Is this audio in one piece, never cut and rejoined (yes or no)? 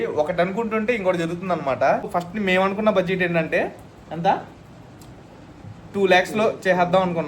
no